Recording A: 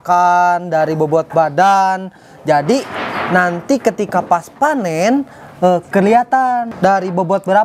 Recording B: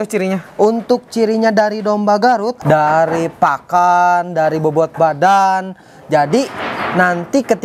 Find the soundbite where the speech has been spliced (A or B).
B